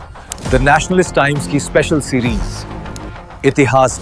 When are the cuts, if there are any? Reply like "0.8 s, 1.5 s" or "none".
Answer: none